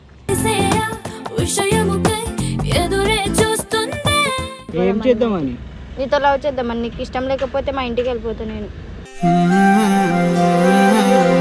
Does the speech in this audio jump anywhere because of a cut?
yes; 1 cut; at 4.7 s

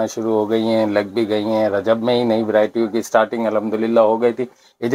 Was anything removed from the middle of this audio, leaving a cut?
no; 0 cuts

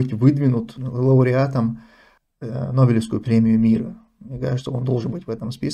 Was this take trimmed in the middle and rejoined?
no; 0 cuts

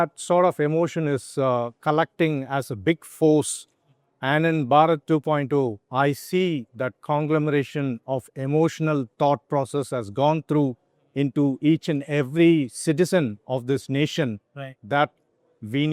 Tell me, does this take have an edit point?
no; 0 cuts

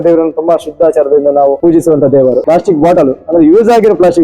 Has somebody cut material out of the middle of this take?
yes; 2 cuts; at 1.6 s, 2.4 s

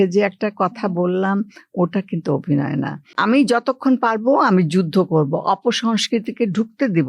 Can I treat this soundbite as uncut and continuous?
no; 1 cut; at 3.1 s

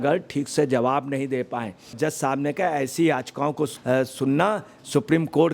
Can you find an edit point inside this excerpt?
yes; 1 cut; at 1.9 s

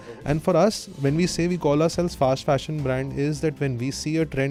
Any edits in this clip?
no; 0 cuts

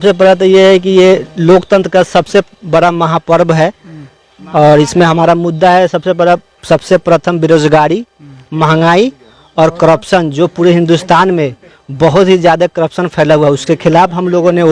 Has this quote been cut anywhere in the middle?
no; 0 cuts

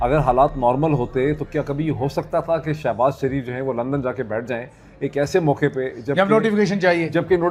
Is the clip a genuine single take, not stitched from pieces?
yes; 0 cuts

